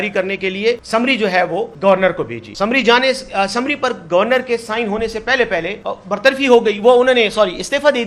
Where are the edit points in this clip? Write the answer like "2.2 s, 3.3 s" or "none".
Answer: 0.8 s, 1.7 s, 2.4 s, 5.8 s